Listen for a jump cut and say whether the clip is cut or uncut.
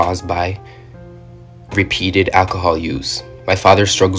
cut